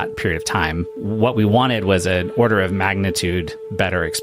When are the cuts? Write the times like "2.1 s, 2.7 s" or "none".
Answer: 1.0 s